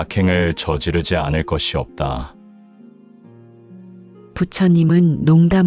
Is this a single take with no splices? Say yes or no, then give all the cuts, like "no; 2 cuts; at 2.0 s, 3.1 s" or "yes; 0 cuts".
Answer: no; 2 cuts; at 2.4 s, 4.3 s